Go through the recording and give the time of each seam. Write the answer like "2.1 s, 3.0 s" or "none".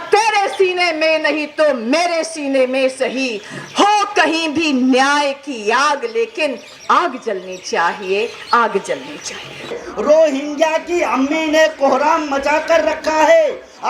9.8 s